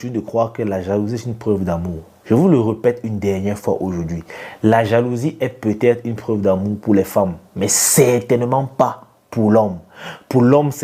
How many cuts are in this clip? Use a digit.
0